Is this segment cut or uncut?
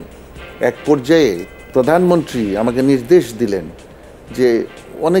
cut